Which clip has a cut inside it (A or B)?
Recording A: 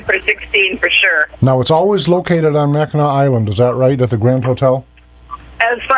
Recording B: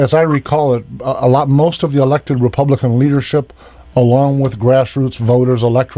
B